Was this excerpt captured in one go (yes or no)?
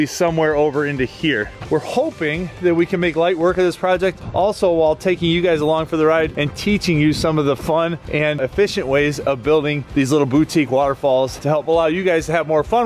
no